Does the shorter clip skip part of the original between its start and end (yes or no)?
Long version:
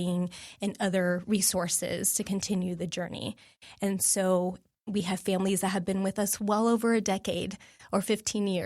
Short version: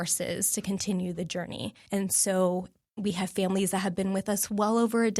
yes